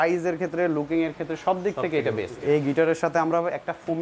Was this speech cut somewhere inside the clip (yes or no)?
yes